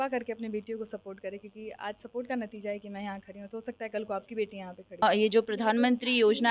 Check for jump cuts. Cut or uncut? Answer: cut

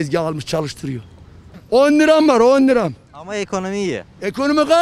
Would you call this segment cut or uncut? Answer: cut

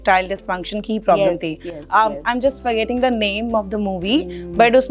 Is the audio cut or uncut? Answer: uncut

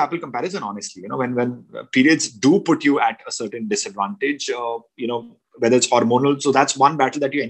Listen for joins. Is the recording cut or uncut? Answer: uncut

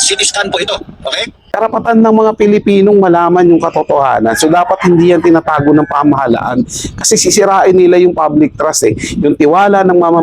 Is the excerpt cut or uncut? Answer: cut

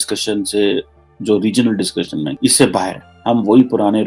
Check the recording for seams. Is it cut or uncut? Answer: cut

